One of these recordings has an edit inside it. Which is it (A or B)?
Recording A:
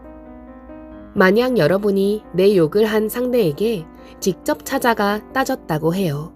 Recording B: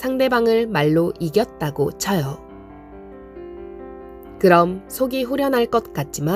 A